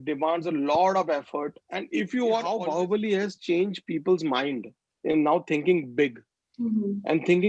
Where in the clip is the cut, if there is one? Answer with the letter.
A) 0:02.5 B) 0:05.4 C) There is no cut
A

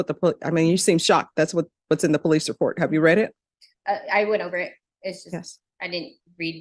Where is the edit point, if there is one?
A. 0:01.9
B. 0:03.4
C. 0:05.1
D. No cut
D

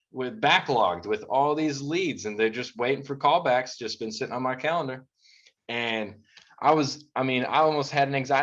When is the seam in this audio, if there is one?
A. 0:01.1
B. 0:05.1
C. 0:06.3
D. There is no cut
D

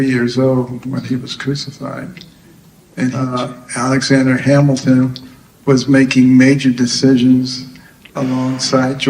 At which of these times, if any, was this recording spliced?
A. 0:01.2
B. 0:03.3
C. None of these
B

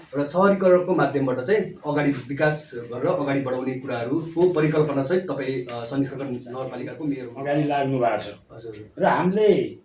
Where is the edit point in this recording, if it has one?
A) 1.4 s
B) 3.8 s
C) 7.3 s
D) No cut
C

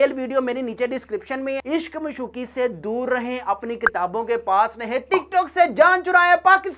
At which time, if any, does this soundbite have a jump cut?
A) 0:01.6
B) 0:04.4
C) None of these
A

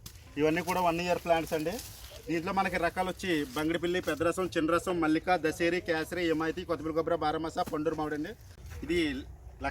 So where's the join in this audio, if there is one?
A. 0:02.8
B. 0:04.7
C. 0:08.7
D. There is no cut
C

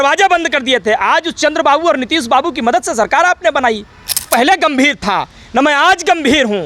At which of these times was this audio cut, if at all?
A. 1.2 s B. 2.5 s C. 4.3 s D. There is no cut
C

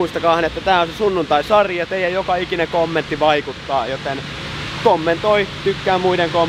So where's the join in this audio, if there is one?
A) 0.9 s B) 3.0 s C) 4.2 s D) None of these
D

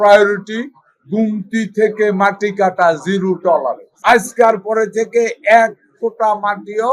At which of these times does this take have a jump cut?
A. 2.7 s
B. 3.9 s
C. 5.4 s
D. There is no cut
B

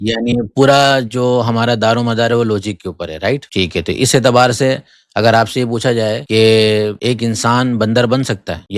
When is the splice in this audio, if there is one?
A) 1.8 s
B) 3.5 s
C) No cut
B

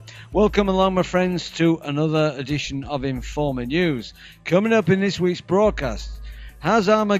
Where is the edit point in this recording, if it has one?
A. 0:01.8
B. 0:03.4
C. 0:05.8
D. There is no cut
C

